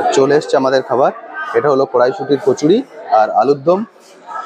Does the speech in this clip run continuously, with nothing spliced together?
yes; 0 cuts

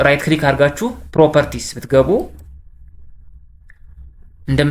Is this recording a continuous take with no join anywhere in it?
yes; 0 cuts

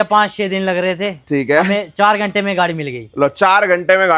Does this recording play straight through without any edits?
yes; 0 cuts

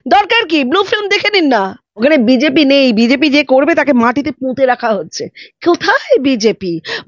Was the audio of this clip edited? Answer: yes; 1 cut; at 1.9 s

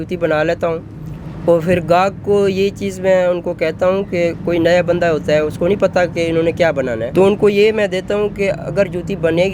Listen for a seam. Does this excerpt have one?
yes; 1 cut; at 7.1 s

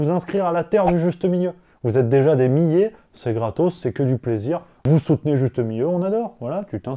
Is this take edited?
yes; 1 cut; at 4.7 s

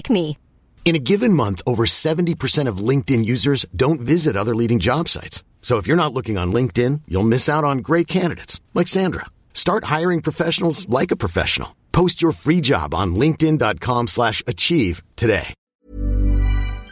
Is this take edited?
yes; 1 cut; at 15.6 s

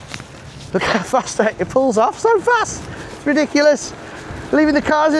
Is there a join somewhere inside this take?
no; 0 cuts

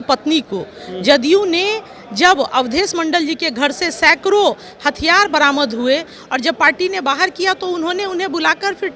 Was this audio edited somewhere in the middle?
no; 0 cuts

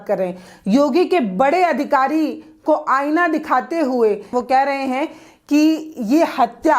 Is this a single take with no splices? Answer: no; 1 cut; at 4.3 s

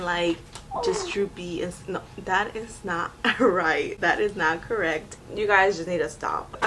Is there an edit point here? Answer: no; 0 cuts

